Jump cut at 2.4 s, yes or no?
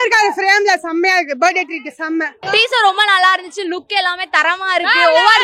yes